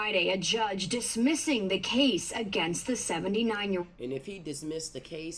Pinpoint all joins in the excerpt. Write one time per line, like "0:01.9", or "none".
none